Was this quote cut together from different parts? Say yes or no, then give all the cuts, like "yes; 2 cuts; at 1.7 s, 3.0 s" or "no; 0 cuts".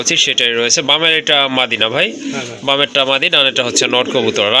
no; 0 cuts